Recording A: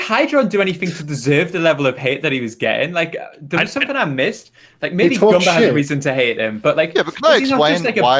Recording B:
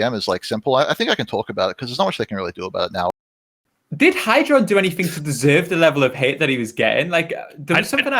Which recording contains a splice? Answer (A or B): B